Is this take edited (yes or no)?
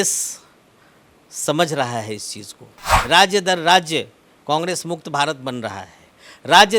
yes